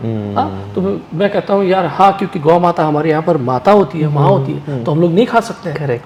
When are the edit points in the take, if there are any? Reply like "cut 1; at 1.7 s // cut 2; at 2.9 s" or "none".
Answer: none